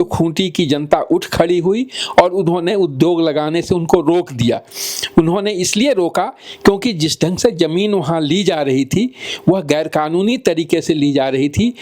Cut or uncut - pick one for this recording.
uncut